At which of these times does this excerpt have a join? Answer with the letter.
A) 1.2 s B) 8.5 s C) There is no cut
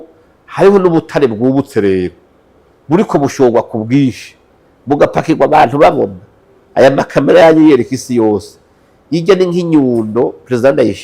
C